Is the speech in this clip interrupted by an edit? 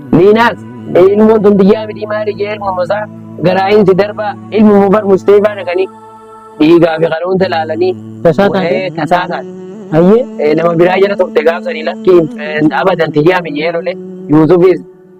no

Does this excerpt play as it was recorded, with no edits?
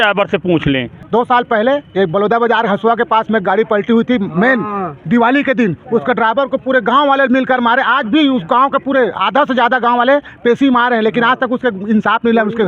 no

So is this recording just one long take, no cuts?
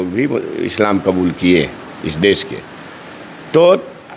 yes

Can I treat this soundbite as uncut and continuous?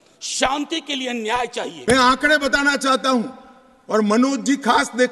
no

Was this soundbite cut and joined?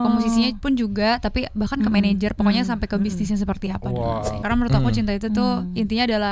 yes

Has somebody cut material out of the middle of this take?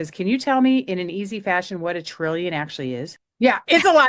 yes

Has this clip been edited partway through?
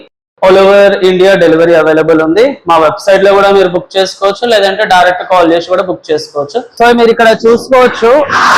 yes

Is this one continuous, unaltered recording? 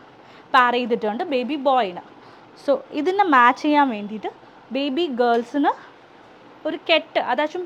yes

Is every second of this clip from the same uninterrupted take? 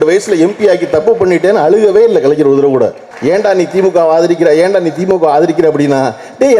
no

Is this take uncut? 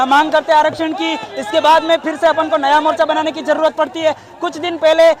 yes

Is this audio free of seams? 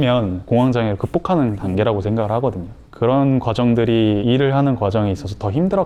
yes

